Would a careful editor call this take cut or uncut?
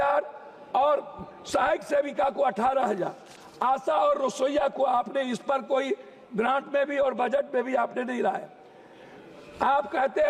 uncut